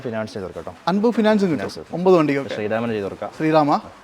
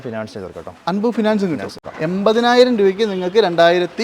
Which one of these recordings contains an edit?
second; 1 cut; at 1.8 s

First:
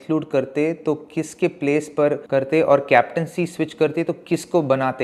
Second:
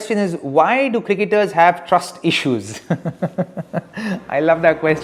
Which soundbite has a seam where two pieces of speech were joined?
first; 1 cut; at 2.2 s

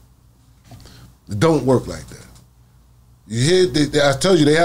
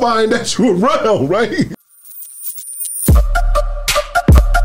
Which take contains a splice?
second; 1 cut; at 1.7 s

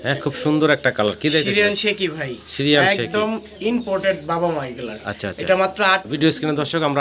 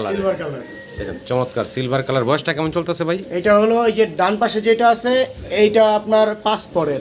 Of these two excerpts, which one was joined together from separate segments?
first; 1 cut; at 6.0 s

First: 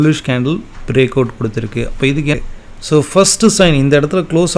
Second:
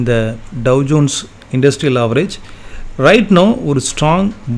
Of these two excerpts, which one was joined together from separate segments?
first; 1 cut; at 2.3 s

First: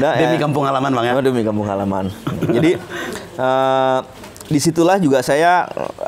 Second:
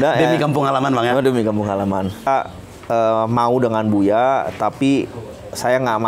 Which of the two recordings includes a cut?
second; 1 cut; at 2.3 s

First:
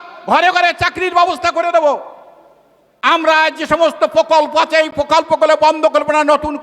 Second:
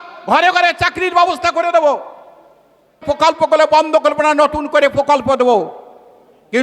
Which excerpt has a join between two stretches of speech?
second; 1 cut; at 3.0 s

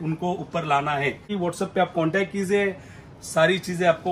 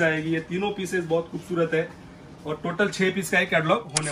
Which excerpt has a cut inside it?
first; 1 cut; at 1.3 s

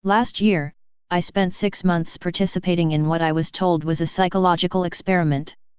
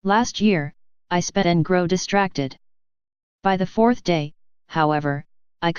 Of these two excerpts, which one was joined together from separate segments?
first; 1 cut; at 1.4 s

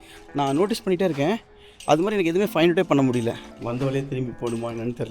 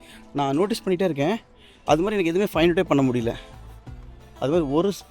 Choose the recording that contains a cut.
first; 1 cut; at 3.5 s

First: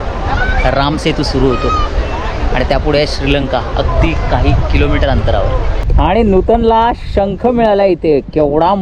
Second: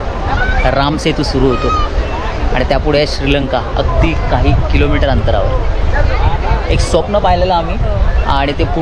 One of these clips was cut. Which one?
first; 1 cut; at 5.9 s

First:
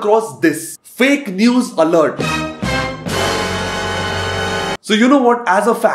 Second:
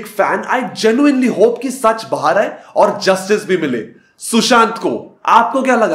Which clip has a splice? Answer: first; 1 cut; at 4.8 s

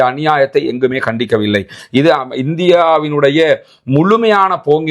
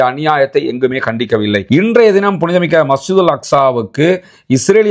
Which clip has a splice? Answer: second; 1 cut; at 1.6 s

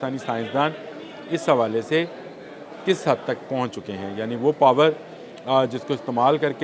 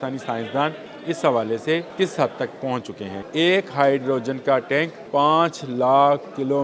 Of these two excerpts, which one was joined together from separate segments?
second; 4 cuts; at 0.9 s, 1.9 s, 3.1 s, 5.0 s

